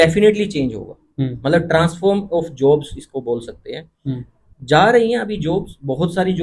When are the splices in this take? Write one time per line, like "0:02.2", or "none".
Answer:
none

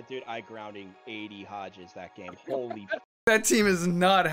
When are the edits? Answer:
0:03.3

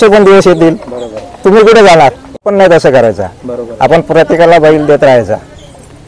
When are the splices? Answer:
0:02.4

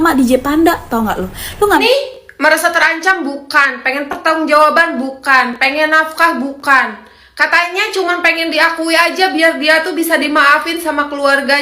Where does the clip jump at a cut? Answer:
0:01.8

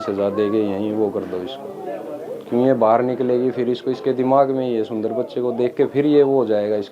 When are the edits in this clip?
none

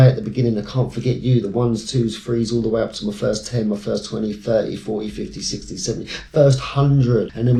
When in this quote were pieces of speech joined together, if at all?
none

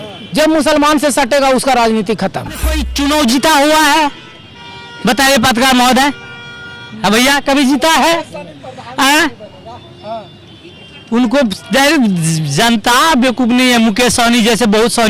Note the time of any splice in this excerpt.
0:02.8

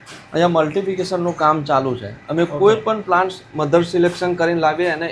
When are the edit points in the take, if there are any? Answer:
none

